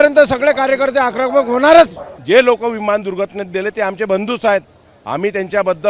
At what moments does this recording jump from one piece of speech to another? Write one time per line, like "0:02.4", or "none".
0:02.1